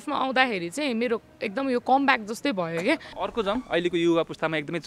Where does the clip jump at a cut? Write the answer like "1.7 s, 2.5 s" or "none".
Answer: 3.1 s

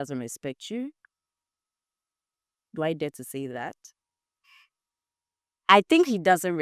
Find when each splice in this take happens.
none

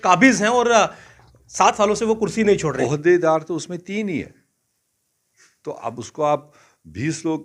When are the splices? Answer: 2.8 s

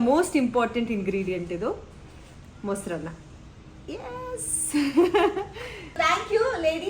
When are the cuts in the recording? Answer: 5.9 s

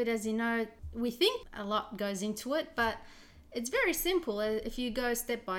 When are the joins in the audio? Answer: none

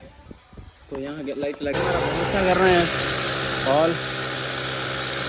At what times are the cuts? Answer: 1.7 s

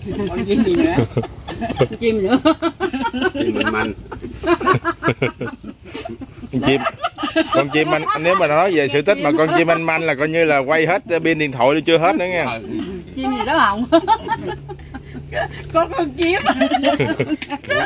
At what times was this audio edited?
none

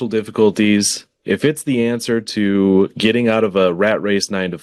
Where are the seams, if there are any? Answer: none

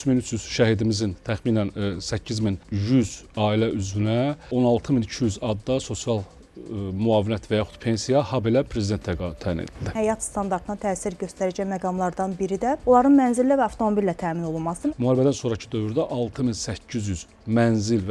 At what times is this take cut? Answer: 2.7 s, 4.4 s, 9.9 s, 12.8 s, 14.9 s

